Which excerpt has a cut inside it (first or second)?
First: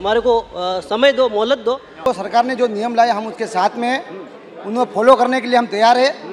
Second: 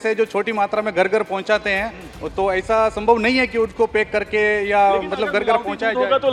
first